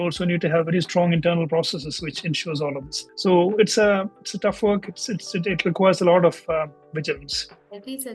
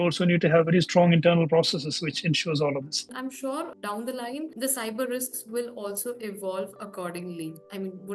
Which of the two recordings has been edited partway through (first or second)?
second